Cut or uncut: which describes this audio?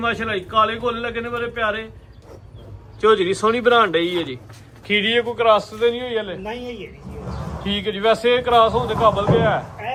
uncut